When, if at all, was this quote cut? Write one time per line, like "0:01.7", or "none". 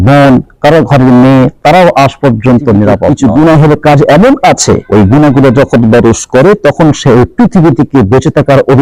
0:03.1
0:04.8